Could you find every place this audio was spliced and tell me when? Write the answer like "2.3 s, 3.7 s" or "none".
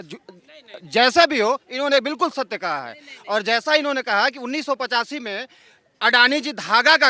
none